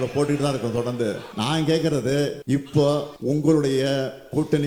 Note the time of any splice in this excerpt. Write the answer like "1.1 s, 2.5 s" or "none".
1.3 s, 2.4 s, 3.1 s